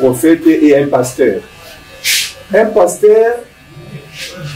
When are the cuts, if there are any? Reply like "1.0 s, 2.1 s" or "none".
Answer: none

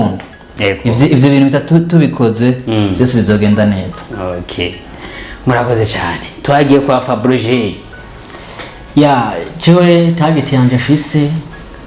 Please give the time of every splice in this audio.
none

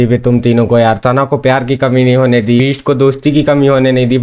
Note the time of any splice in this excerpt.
1.0 s, 2.6 s

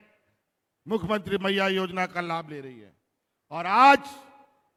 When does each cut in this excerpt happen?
none

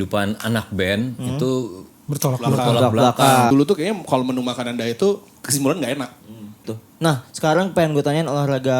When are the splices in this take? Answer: 3.5 s, 6.7 s

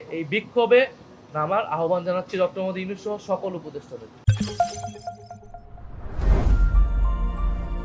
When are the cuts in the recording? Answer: none

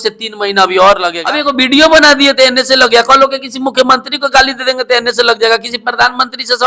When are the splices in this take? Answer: 1.1 s

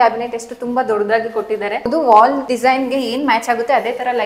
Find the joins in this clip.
1.9 s

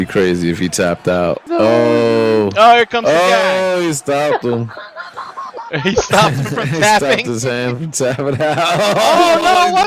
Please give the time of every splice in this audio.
1.4 s

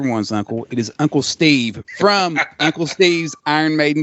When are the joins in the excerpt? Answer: 1.8 s

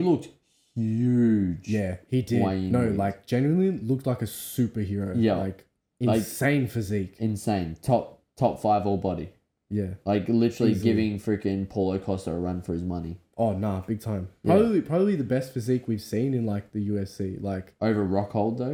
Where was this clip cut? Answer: none

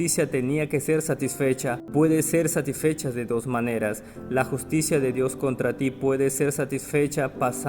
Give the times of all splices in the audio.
1.8 s

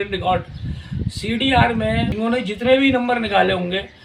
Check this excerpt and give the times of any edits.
2.1 s

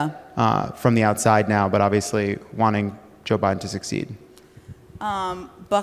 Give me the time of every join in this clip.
none

